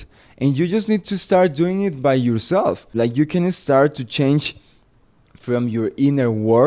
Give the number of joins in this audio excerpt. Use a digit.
1